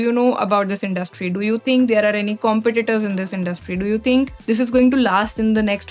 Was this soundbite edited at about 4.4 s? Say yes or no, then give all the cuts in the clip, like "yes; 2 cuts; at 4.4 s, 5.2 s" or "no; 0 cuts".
yes; 1 cut; at 4.4 s